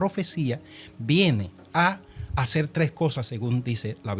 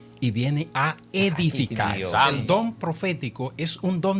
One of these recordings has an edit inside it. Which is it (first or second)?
second